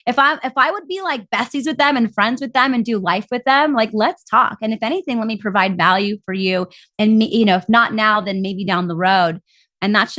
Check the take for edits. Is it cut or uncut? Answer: uncut